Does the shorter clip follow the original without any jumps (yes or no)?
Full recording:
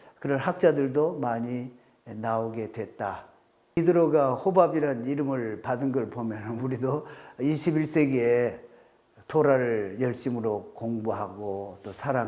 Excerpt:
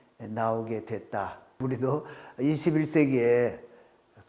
no